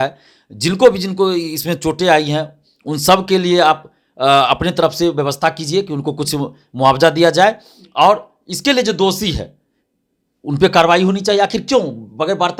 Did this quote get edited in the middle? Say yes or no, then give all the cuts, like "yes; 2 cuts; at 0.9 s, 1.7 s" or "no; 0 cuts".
no; 0 cuts